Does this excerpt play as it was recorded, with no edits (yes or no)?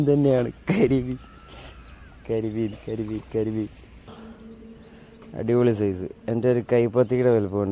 no